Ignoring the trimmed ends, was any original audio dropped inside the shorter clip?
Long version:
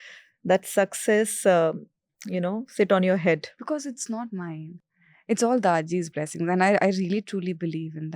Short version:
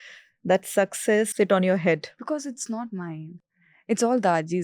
yes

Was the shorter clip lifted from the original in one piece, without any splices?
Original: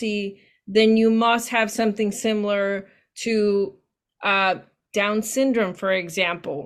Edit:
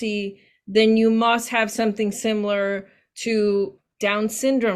no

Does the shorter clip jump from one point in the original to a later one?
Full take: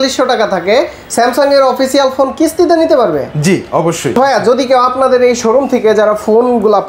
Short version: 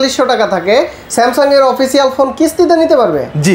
no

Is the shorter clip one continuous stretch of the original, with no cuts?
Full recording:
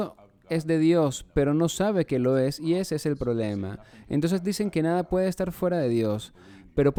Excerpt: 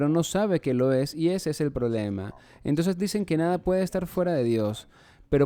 yes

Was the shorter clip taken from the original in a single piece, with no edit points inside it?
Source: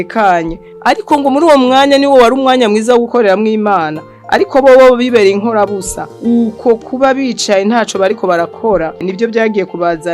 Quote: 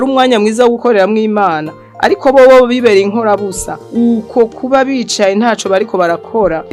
yes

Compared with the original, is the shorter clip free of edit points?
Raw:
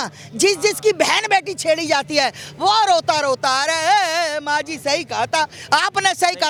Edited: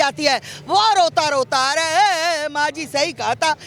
yes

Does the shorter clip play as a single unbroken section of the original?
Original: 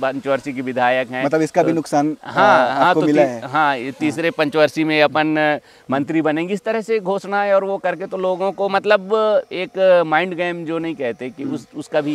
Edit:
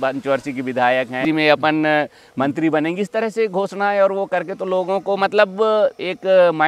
no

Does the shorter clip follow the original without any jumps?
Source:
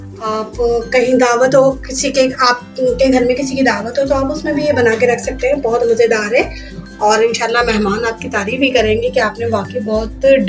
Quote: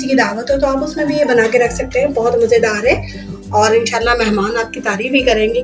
yes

